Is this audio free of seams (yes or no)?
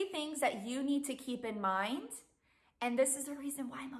yes